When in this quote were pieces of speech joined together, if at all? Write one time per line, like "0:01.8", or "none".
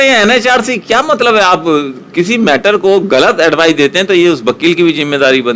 none